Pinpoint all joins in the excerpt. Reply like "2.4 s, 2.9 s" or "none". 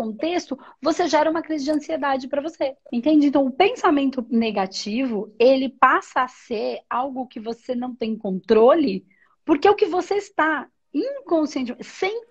2.8 s